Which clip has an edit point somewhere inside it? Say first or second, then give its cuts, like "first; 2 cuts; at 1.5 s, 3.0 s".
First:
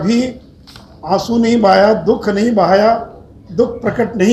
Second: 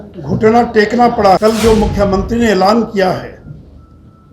second; 1 cut; at 1.4 s